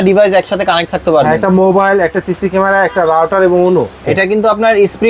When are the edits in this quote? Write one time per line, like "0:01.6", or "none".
0:04.0